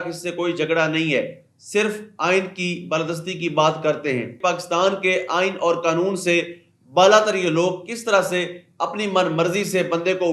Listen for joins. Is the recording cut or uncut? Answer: cut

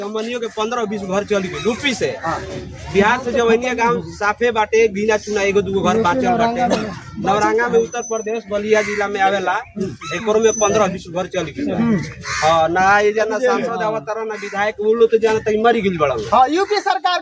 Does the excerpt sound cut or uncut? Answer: uncut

